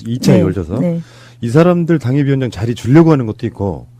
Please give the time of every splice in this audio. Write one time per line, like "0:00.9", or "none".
none